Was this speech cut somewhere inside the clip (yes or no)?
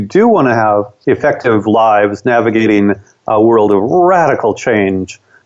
yes